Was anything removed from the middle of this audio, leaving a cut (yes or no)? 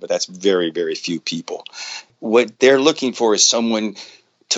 yes